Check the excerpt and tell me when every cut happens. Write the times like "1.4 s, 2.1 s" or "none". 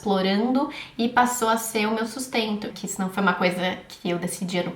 2.7 s